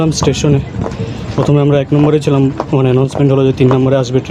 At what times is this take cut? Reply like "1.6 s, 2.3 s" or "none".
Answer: none